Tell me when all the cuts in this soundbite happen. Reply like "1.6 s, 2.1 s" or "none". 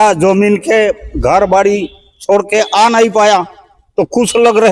none